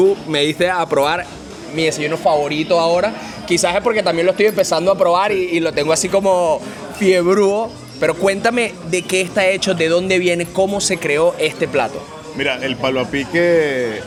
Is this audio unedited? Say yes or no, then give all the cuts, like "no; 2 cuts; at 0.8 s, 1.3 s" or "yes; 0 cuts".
yes; 0 cuts